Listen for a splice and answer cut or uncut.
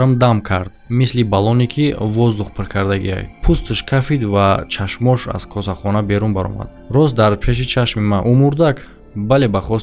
uncut